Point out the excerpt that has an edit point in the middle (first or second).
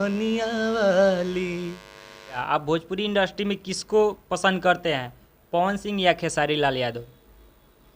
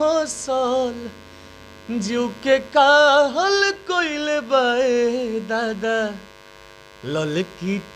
first